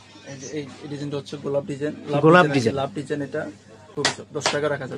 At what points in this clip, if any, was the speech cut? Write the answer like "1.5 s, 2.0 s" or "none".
3.9 s